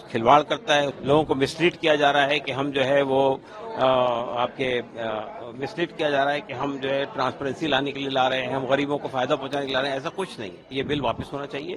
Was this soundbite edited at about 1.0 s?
yes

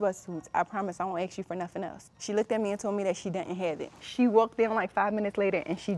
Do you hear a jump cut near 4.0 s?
yes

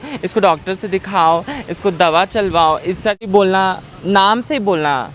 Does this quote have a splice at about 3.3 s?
yes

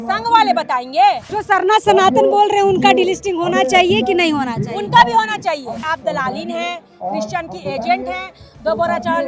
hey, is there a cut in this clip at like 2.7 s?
no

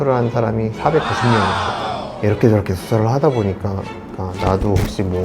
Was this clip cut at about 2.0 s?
yes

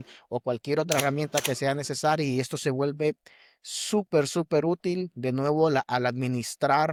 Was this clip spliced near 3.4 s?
no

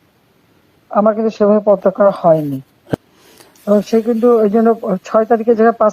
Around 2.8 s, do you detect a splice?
yes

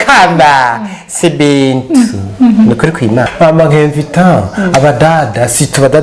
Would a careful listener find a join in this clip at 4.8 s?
no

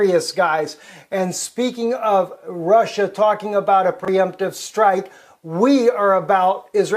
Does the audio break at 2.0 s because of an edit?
no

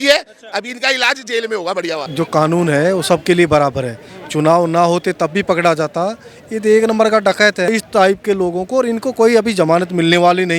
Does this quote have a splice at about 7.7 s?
yes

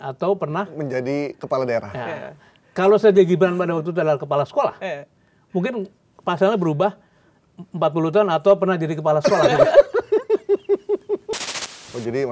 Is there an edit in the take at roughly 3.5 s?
no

